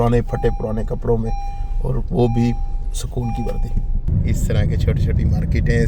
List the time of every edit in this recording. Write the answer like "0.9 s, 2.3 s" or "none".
4.1 s